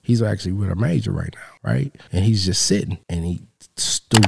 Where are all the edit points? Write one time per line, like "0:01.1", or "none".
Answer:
0:01.8
0:03.0